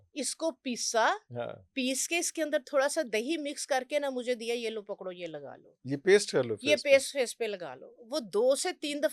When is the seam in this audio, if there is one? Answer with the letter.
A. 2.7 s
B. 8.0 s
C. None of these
C